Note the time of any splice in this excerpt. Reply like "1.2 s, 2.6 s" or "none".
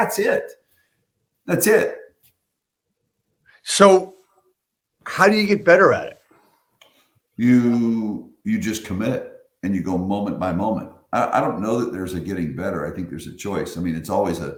none